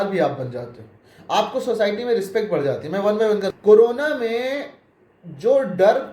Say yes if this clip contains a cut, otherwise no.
yes